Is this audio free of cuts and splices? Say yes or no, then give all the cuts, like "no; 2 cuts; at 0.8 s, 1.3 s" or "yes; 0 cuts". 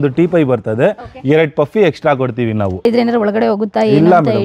no; 1 cut; at 2.8 s